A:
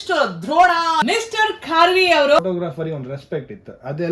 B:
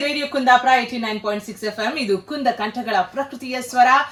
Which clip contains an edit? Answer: A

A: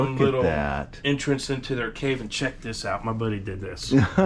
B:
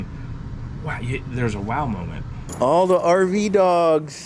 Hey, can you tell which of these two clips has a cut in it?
B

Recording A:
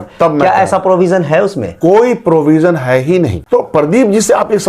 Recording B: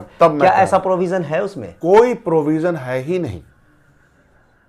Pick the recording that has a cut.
A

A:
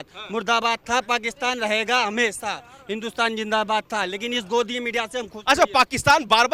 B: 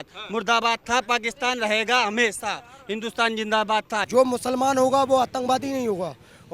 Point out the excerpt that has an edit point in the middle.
B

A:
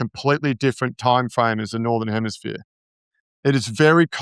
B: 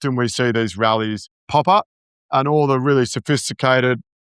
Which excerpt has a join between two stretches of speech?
B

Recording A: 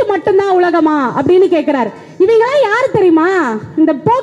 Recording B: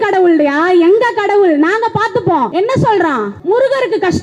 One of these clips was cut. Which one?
B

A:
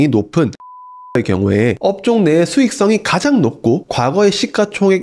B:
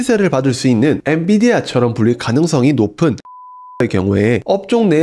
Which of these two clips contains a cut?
B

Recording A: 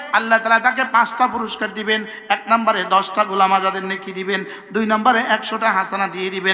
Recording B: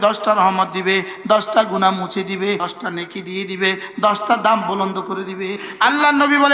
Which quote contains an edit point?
B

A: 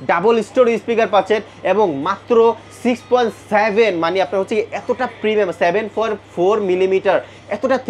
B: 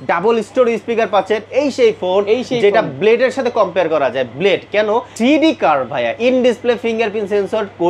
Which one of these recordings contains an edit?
B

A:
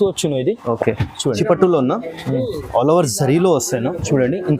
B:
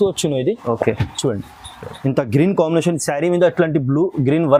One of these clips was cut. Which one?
A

